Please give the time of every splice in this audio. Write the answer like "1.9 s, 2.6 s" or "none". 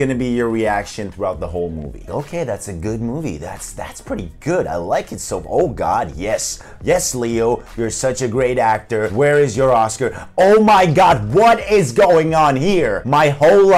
none